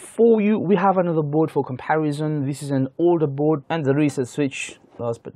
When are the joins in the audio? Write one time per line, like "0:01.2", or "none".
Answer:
0:03.6